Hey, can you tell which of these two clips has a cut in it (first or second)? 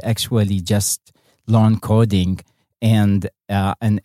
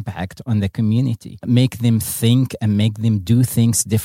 second